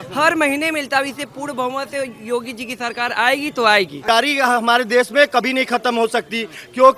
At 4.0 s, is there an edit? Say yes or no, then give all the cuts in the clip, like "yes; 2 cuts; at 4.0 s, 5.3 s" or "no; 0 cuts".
yes; 1 cut; at 4.0 s